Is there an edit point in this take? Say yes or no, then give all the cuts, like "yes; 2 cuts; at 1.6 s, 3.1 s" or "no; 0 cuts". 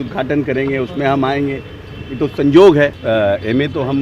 yes; 1 cut; at 3.0 s